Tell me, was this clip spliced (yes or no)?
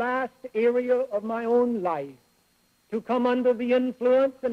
no